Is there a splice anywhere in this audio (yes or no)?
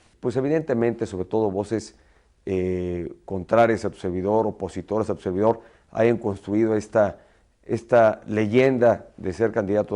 no